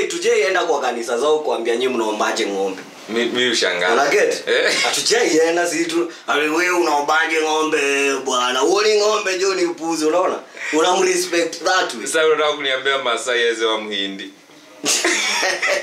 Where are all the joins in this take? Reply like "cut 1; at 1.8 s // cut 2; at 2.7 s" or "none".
none